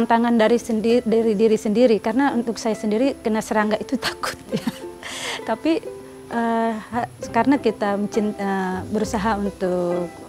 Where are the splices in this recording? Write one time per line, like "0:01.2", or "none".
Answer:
none